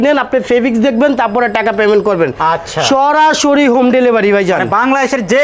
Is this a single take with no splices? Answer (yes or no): yes